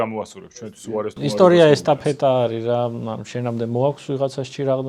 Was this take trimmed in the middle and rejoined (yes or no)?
no